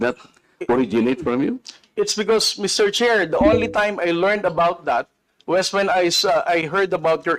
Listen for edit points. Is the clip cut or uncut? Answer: uncut